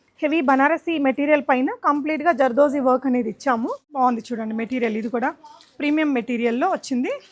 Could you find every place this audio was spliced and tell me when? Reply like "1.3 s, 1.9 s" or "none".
3.8 s